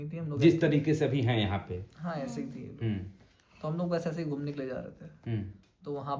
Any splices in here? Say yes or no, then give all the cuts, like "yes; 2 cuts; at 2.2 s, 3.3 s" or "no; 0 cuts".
no; 0 cuts